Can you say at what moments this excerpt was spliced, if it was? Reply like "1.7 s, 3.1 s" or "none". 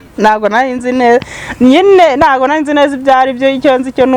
none